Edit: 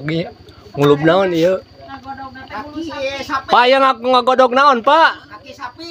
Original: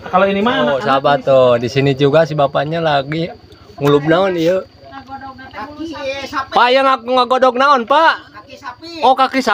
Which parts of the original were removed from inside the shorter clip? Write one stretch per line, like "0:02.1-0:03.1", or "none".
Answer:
none